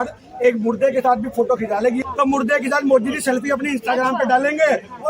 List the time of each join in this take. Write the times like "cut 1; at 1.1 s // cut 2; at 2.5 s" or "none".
cut 1; at 2.0 s